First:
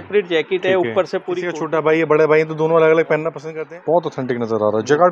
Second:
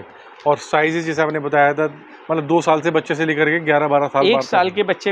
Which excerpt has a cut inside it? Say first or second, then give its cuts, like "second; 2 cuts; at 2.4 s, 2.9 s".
first; 2 cuts; at 1.5 s, 3.4 s